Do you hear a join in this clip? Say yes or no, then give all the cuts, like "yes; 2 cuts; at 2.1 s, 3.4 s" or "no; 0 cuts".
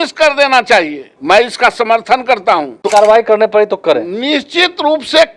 yes; 2 cuts; at 1.1 s, 2.7 s